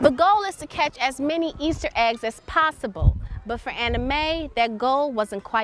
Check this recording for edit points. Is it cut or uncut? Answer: uncut